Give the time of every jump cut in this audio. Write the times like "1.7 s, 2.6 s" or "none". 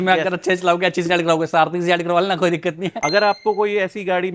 3.0 s